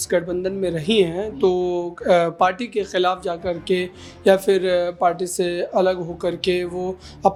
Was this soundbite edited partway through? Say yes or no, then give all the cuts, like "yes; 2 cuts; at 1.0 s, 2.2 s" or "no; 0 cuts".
no; 0 cuts